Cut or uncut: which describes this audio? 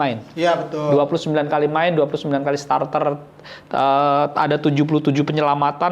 uncut